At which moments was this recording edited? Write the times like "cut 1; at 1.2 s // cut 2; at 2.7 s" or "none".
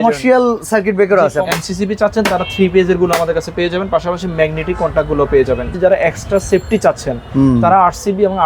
cut 1; at 1.5 s // cut 2; at 5.7 s